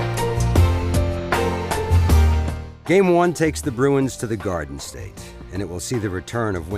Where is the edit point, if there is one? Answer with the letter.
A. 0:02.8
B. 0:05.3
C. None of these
B